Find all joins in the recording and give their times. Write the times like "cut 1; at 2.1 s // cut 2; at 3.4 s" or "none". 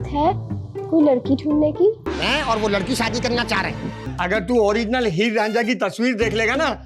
cut 1; at 2.1 s // cut 2; at 4.0 s